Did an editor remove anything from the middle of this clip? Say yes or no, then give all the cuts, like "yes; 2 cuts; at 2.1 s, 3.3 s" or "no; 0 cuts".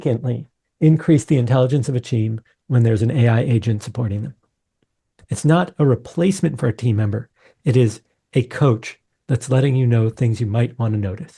no; 0 cuts